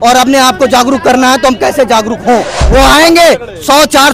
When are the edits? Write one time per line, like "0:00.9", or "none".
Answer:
0:02.6

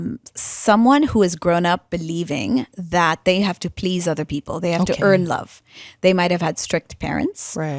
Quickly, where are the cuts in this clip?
none

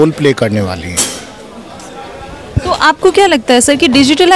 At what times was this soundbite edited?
none

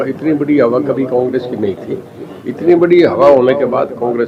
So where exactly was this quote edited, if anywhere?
none

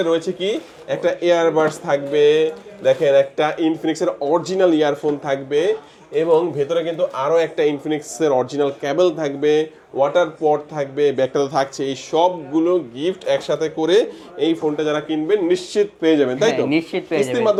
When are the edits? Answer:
none

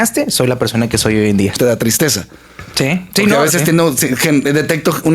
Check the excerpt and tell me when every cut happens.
0:01.6

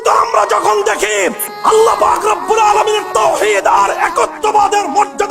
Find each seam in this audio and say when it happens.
0:01.5

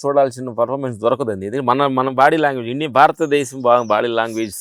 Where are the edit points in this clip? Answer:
none

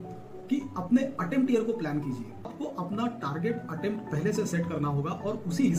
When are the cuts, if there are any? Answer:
0:02.5

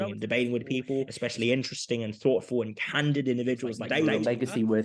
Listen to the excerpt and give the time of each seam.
0:01.1
0:04.1

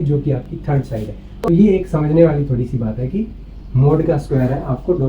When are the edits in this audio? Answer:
0:01.5

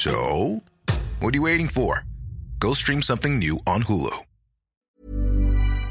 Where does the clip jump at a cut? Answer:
0:05.0

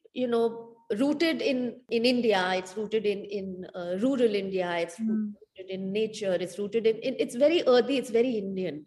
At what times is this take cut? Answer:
0:01.8

